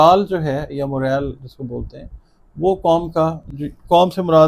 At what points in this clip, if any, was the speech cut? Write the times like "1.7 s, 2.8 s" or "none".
none